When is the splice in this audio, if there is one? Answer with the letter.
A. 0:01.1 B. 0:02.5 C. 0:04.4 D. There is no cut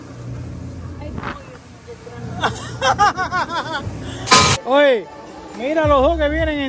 C